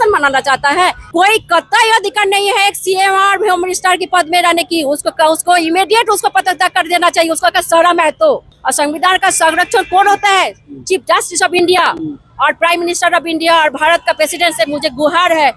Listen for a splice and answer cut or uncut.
cut